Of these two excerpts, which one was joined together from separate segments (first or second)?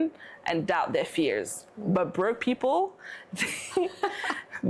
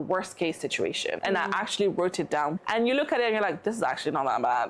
second